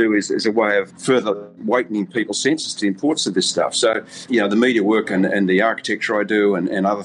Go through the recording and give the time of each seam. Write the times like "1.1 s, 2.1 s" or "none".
1.1 s, 4.1 s